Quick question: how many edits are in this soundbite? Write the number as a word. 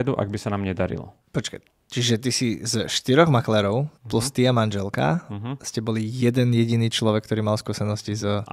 two